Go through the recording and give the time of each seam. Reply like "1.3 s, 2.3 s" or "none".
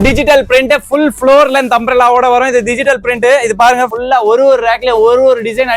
3.9 s